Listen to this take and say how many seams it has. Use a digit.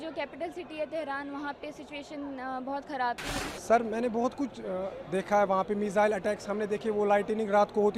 1